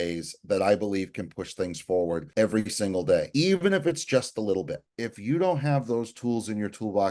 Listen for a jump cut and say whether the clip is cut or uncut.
cut